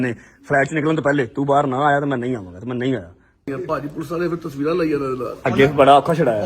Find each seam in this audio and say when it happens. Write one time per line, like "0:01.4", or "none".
0:03.5